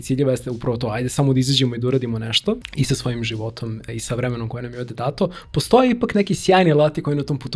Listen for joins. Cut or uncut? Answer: cut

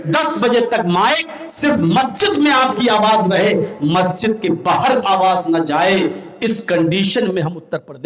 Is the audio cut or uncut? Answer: uncut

